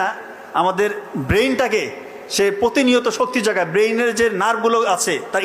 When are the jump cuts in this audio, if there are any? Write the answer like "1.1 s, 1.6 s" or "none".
none